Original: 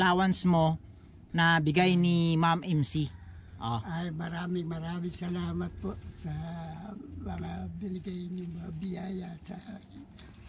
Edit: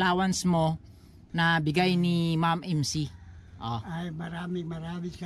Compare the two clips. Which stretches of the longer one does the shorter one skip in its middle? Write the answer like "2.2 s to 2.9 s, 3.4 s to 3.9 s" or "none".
none